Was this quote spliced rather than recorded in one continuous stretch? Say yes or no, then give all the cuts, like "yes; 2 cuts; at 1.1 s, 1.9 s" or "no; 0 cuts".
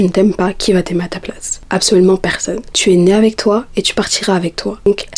no; 0 cuts